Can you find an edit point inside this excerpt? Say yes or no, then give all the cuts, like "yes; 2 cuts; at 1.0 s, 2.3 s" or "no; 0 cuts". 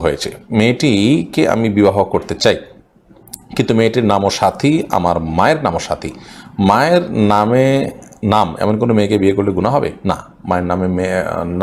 no; 0 cuts